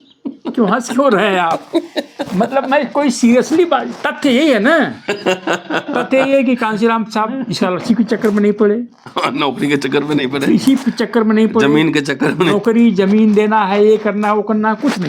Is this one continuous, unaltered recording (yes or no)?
yes